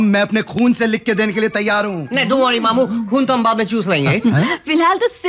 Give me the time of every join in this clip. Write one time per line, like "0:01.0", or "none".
none